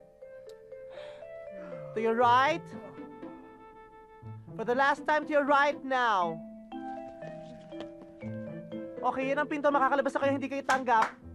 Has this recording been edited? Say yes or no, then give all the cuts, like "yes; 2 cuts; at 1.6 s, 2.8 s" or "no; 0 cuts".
no; 0 cuts